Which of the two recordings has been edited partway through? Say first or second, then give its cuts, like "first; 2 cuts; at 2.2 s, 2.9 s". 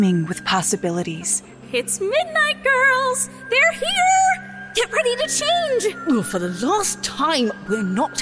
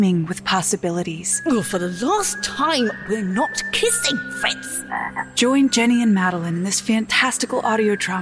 second; 2 cuts; at 1.4 s, 5.3 s